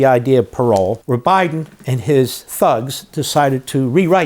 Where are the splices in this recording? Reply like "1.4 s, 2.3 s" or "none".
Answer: 1.0 s